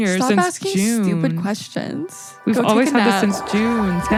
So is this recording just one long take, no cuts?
yes; 0 cuts

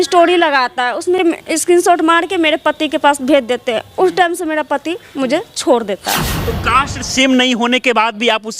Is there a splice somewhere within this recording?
yes; 2 cuts; at 1.2 s, 6.4 s

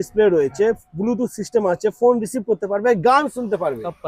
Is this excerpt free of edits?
yes; 0 cuts

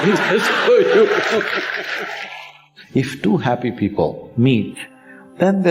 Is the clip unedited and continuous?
no; 1 cut; at 2.7 s

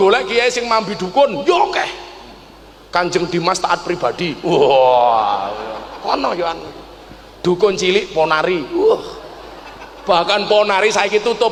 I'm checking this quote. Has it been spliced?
no; 0 cuts

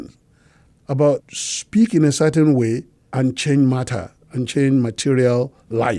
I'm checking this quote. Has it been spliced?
yes; 2 cuts; at 1.2 s, 3.0 s

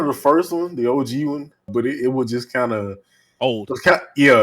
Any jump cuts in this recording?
yes; 1 cut; at 1.7 s

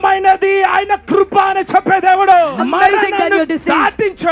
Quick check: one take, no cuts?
no; 1 cut; at 2.5 s

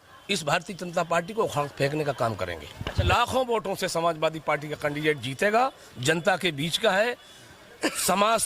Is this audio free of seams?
no; 1 cut; at 3.0 s

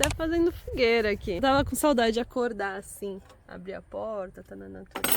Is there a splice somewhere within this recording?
yes; 1 cut; at 1.4 s

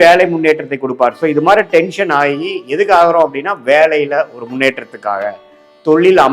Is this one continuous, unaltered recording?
yes; 0 cuts

